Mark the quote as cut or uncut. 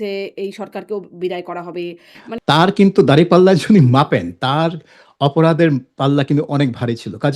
cut